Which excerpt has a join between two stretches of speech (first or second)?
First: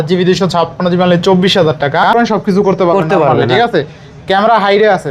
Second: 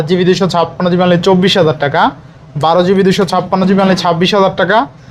first